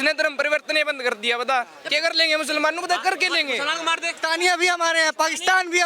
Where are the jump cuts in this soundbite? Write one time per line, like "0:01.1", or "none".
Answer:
0:04.1